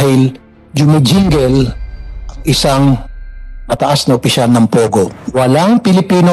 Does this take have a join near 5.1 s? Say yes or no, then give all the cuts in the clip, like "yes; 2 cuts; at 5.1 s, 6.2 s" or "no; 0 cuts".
yes; 1 cut; at 5.1 s